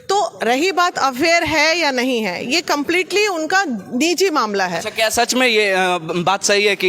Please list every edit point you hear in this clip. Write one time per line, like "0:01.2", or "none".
none